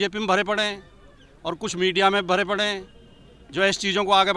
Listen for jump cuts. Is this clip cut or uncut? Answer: uncut